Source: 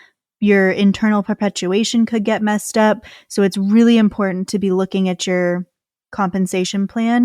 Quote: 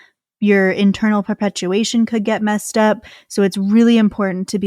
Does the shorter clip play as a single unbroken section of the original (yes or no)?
yes